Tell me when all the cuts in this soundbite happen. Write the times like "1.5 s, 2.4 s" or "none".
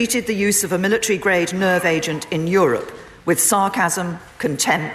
none